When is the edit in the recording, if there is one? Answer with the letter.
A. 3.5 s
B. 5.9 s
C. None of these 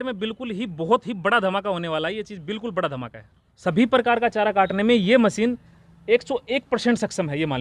A